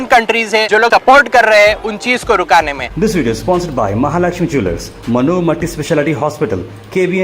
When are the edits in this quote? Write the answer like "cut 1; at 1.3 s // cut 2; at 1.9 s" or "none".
cut 1; at 0.8 s // cut 2; at 2.9 s